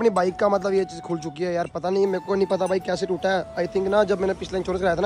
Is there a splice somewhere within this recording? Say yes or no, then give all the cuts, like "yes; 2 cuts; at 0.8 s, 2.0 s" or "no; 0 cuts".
no; 0 cuts